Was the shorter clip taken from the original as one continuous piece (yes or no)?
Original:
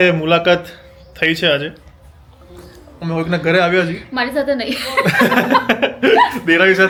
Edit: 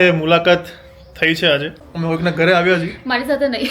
no